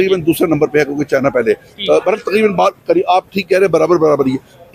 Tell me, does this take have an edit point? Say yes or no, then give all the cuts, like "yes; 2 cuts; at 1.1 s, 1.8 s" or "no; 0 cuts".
no; 0 cuts